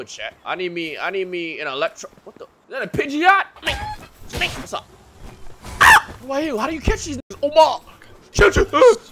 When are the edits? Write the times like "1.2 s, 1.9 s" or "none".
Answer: 3.6 s, 4.7 s, 6.2 s